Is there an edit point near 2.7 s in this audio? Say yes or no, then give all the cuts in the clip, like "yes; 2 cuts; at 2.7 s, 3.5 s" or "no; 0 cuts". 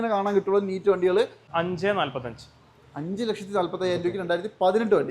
no; 1 cut; at 1.4 s